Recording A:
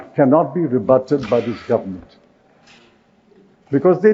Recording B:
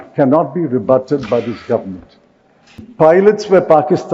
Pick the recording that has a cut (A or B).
B